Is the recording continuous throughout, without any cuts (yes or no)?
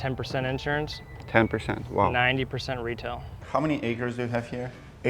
no